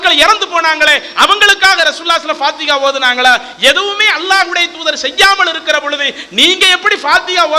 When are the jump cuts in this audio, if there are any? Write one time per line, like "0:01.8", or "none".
none